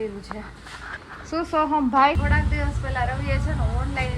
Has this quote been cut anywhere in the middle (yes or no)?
yes